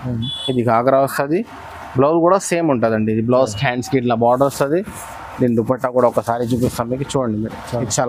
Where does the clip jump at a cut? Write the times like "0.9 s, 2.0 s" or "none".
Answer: none